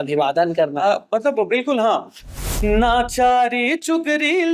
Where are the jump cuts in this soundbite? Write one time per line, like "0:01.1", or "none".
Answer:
0:02.4